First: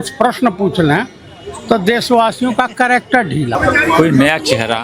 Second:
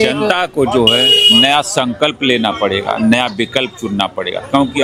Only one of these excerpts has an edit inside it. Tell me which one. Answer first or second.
first